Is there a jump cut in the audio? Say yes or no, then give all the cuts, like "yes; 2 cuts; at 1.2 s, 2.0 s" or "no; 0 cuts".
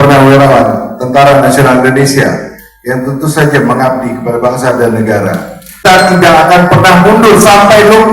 yes; 1 cut; at 5.9 s